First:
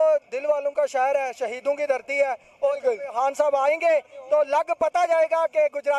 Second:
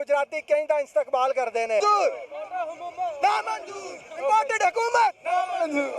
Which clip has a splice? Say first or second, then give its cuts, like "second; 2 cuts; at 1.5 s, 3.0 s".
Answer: second; 1 cut; at 1.8 s